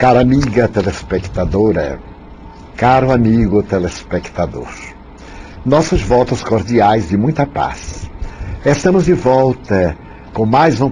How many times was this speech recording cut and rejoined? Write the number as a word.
zero